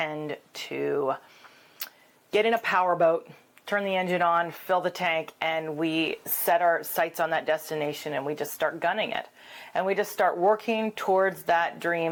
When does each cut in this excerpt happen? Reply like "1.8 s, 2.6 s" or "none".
none